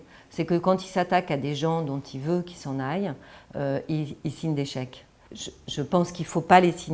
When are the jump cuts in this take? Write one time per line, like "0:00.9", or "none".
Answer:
0:05.2